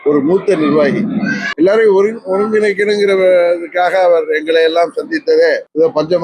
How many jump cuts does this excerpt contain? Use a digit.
1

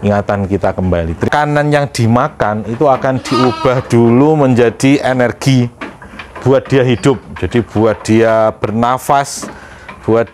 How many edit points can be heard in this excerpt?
1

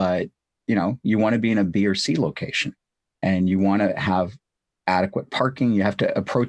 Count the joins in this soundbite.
0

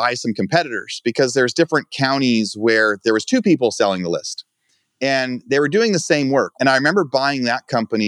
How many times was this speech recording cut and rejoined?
1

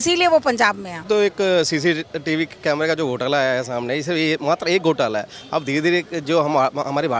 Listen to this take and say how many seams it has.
1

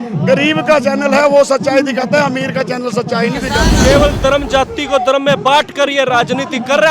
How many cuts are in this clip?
1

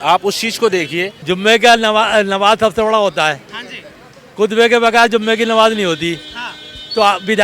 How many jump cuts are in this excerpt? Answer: 1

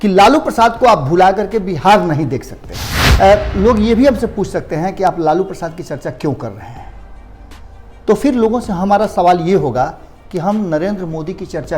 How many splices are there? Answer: 1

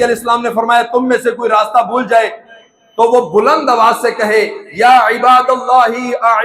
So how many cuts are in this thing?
0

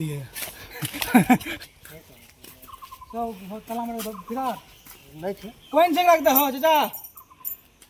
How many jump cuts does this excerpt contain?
0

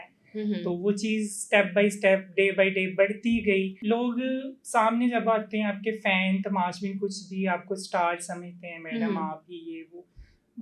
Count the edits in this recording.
1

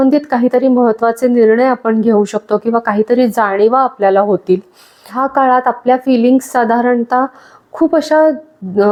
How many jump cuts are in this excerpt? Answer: 0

